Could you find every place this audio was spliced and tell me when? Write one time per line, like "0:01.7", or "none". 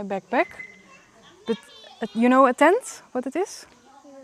none